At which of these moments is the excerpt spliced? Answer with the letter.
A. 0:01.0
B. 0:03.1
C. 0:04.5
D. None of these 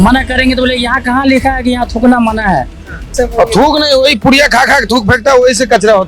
B